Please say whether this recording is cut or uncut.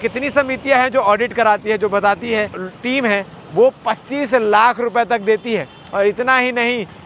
cut